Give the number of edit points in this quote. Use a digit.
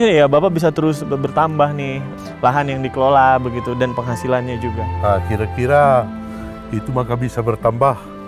1